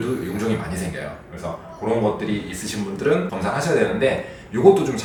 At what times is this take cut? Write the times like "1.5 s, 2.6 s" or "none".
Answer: none